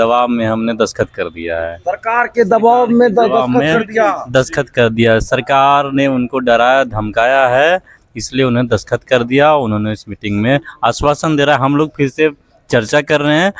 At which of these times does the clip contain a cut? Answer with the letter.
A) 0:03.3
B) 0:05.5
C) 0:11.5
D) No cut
D